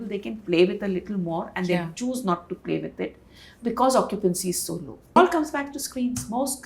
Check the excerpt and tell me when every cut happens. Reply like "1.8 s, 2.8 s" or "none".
5.2 s